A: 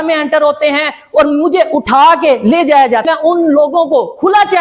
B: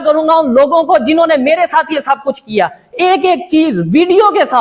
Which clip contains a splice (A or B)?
A